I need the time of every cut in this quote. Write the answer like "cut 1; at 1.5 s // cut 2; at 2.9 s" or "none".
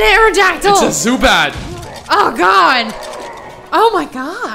none